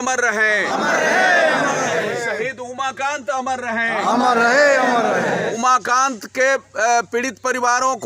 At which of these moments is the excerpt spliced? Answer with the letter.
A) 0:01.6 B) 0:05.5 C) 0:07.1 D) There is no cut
B